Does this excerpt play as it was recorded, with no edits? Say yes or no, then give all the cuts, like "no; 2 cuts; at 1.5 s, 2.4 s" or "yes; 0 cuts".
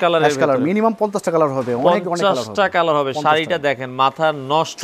yes; 0 cuts